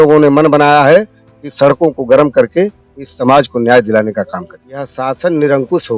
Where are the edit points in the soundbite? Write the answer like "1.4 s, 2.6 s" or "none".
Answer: 4.9 s